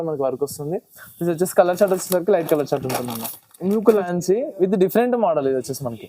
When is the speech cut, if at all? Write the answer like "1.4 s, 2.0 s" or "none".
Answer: 4.1 s

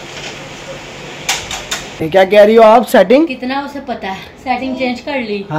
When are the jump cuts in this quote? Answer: 2.0 s

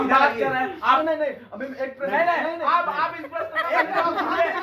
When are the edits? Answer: 1.0 s

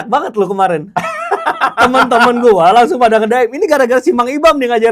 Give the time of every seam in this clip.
none

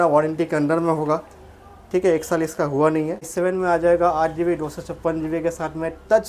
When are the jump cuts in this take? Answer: 3.3 s

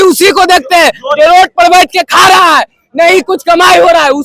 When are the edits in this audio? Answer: none

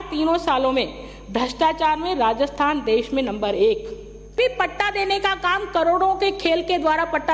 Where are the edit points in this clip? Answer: 4.3 s

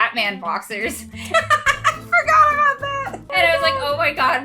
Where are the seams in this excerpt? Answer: 3.3 s

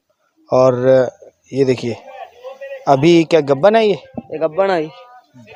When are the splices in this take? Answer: none

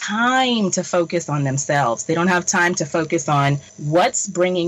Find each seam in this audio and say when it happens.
3.7 s

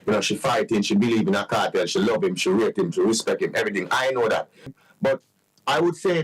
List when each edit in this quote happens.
4.8 s

